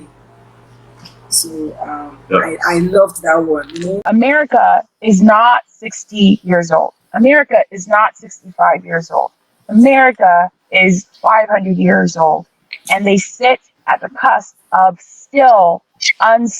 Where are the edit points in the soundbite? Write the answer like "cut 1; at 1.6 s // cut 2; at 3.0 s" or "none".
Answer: cut 1; at 3.9 s